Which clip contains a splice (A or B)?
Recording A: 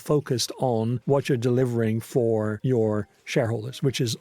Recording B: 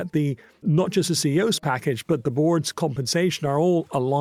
A